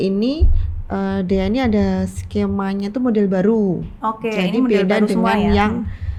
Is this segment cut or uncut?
uncut